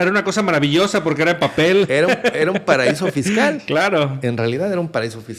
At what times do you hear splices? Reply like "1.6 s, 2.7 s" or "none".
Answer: none

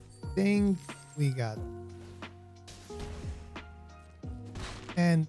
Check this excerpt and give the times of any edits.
1.5 s, 3.2 s, 4.4 s

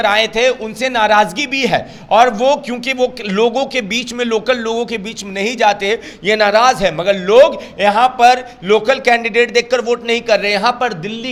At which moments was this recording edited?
none

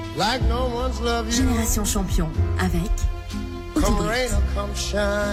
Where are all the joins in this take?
none

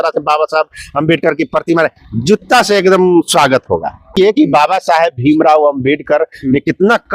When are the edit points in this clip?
4.2 s

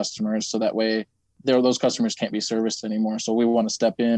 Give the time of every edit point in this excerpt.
1.3 s

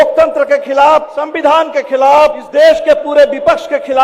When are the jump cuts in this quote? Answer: 1.2 s, 2.4 s

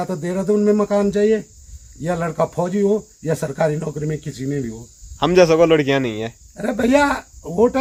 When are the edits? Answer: none

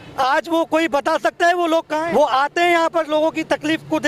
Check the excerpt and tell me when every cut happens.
2.0 s

